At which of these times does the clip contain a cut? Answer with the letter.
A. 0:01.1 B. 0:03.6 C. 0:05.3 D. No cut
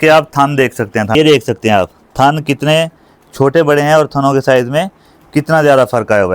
A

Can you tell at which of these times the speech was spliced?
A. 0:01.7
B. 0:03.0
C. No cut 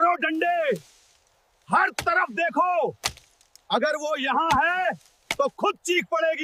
C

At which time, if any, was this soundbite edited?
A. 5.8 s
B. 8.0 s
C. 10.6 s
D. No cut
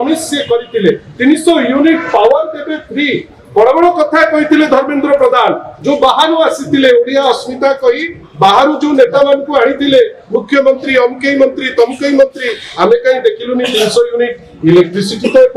D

